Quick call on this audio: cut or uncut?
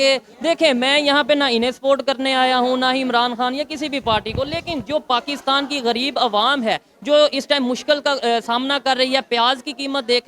uncut